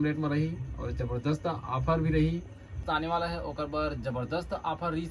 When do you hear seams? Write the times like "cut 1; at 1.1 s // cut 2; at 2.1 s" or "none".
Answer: cut 1; at 2.8 s